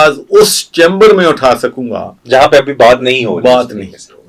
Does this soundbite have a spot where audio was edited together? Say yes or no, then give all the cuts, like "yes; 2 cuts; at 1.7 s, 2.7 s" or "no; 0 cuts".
no; 0 cuts